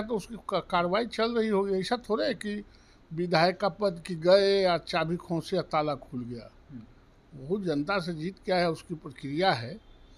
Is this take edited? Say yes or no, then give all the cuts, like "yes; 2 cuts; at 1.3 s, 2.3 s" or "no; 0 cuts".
no; 0 cuts